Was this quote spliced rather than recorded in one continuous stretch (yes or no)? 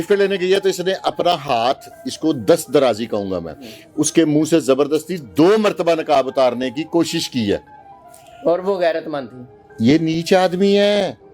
no